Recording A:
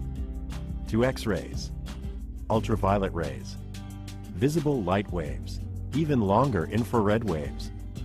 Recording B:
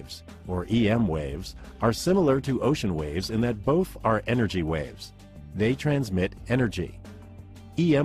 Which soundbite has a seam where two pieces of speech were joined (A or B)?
A